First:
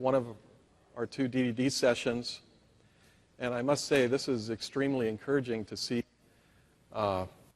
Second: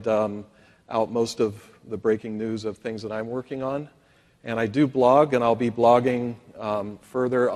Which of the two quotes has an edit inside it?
second; 1 cut; at 4.0 s

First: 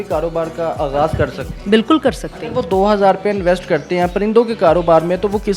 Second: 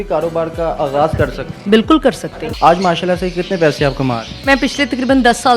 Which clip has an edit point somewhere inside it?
second; 2 cuts; at 2.4 s, 4.5 s

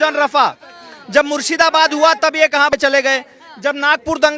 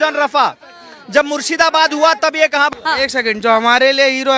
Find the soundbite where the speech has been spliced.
second; 1 cut; at 2.7 s

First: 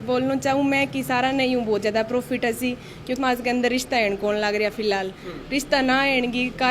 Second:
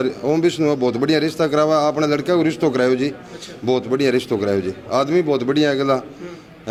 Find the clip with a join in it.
first; 1 cut; at 3.2 s

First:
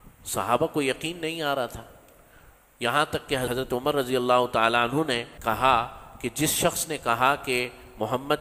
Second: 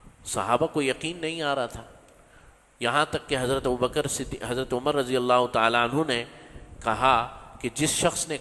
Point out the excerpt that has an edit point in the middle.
first; 2 cuts; at 3.5 s, 5.3 s

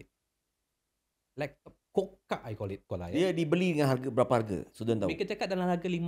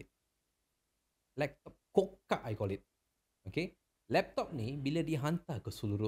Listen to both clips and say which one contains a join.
first; 1 cut; at 2.8 s

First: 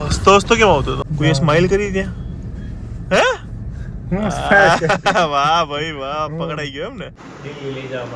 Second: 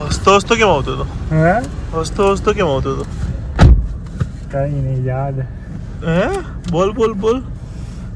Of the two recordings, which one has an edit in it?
first; 2 cuts; at 1.0 s, 7.2 s

